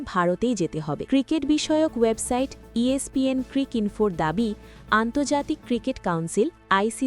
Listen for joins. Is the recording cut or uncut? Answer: cut